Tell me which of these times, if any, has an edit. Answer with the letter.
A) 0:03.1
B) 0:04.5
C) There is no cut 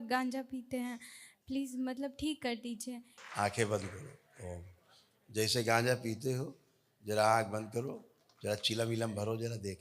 A